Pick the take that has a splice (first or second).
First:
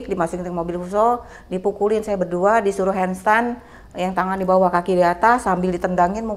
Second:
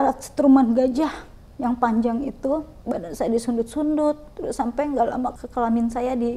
second